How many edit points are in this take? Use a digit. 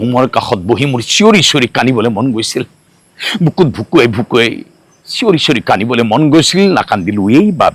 0